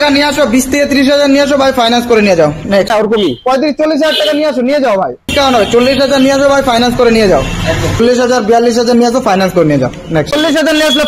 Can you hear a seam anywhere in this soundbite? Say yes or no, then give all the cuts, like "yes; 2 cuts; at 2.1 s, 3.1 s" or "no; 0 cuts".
yes; 4 cuts; at 2.9 s, 5.3 s, 8.0 s, 10.3 s